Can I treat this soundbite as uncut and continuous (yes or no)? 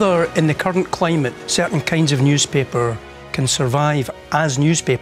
no